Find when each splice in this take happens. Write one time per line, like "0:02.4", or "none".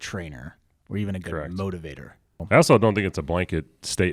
0:02.4

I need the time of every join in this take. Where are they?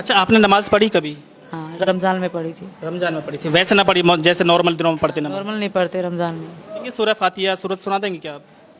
0:06.9

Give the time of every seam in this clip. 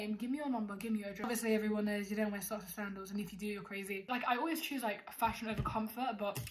0:01.3
0:04.1

